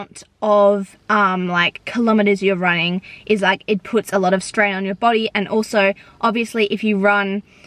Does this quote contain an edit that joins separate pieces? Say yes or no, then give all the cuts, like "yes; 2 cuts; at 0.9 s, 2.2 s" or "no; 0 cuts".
no; 0 cuts